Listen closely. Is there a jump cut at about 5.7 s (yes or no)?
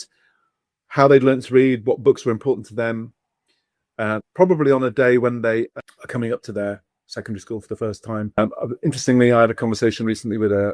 yes